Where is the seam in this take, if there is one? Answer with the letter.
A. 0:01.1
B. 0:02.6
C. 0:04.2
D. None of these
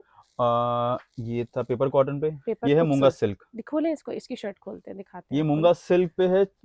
B